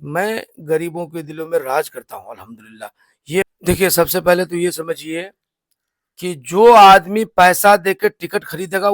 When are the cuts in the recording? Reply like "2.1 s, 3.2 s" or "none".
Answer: 3.4 s